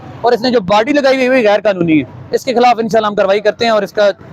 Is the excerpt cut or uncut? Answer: uncut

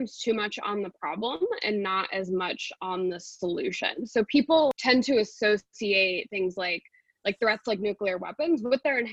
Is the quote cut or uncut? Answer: cut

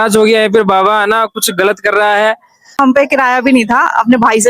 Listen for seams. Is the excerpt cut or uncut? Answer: cut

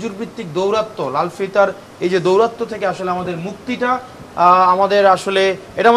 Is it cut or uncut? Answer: uncut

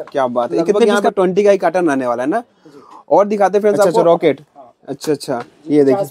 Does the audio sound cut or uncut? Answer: cut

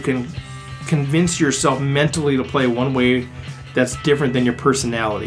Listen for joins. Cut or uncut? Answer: uncut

